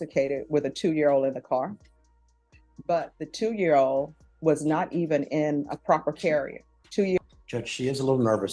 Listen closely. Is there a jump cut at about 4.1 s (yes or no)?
no